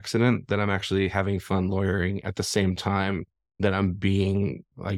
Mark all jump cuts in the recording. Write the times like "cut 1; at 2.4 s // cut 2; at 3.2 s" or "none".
none

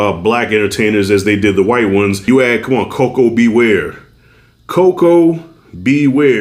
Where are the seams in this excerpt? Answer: cut 1; at 2.2 s

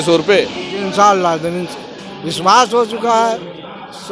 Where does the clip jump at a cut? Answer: none

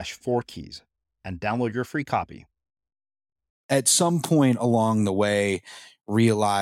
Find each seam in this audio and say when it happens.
cut 1; at 3.6 s

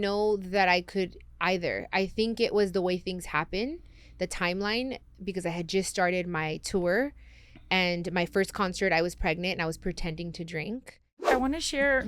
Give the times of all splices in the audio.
cut 1; at 11.1 s

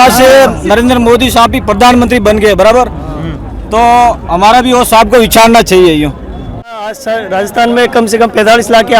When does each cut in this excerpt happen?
cut 1; at 6.8 s

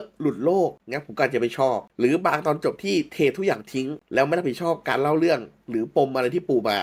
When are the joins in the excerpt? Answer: none

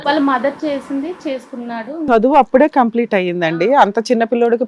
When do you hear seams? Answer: cut 1; at 2.1 s

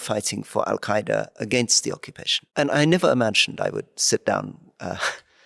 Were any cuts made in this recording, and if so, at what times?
none

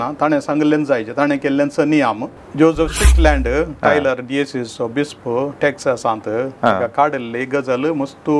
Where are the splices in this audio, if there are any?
cut 1; at 2.3 s

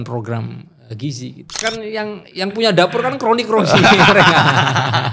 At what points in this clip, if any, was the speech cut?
cut 1; at 1.6 s

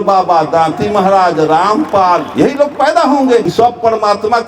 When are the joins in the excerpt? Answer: cut 1; at 2.3 s // cut 2; at 3.5 s

